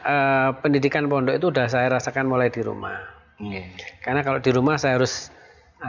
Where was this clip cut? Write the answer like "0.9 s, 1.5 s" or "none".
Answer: none